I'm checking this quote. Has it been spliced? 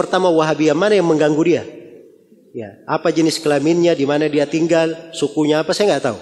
no; 0 cuts

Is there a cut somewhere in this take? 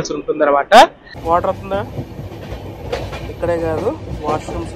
yes; 1 cut; at 1.1 s

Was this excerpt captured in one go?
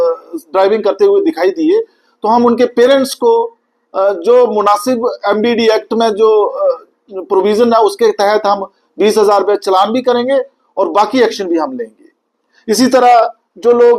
yes; 0 cuts

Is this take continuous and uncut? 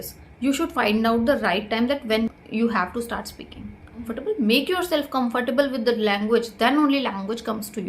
no; 2 cuts; at 2.3 s, 4.1 s

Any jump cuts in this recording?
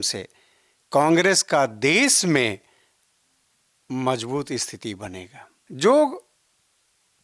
yes; 1 cut; at 5.6 s

